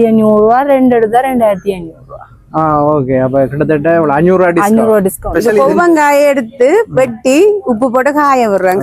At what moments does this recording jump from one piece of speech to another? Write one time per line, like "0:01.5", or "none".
0:05.3

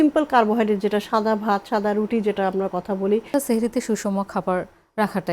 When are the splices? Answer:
0:03.3

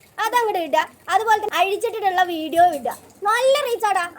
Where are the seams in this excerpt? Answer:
0:01.5

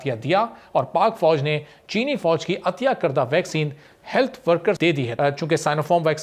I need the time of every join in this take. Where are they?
0:05.1

